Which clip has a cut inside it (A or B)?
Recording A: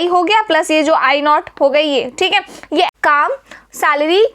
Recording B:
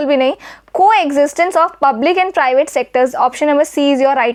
A